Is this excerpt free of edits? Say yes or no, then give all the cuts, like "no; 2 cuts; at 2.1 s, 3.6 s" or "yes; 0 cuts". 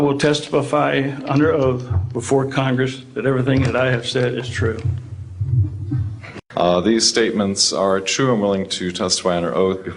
no; 1 cut; at 6.3 s